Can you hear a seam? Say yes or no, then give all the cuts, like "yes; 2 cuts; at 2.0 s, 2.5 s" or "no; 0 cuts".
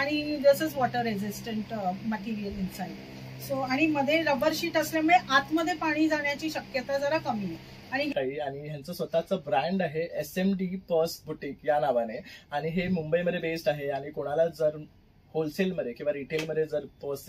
yes; 1 cut; at 8.1 s